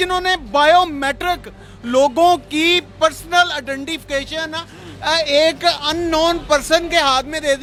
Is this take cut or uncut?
uncut